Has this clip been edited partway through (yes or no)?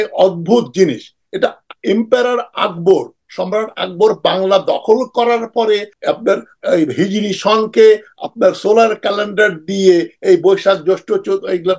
yes